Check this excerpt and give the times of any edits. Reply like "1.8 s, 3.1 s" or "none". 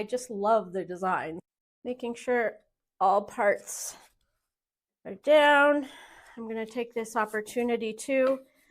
1.4 s